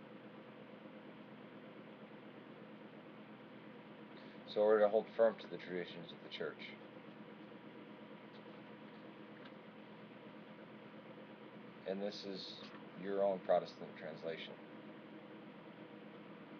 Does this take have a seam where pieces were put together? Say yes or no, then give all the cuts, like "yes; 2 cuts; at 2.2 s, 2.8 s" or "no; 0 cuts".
yes; 1 cut; at 12.0 s